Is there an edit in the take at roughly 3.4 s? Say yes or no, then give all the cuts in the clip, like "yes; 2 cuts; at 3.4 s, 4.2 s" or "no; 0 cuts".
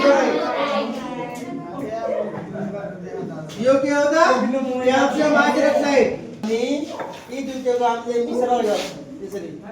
no; 1 cut; at 6.4 s